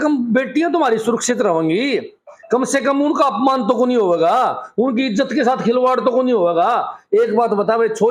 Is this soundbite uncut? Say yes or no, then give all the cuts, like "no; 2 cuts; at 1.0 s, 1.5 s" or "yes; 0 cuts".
yes; 0 cuts